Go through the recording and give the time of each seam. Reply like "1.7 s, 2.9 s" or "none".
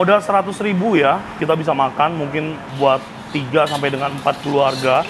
1.4 s, 2.7 s